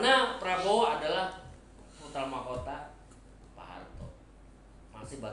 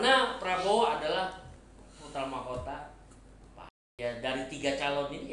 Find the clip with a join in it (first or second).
second